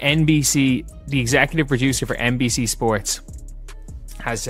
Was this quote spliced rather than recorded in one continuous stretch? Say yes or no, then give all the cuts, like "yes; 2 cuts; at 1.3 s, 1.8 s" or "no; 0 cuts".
no; 0 cuts